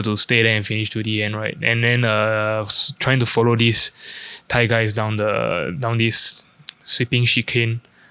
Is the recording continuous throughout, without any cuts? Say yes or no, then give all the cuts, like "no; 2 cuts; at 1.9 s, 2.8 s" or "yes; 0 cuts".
yes; 0 cuts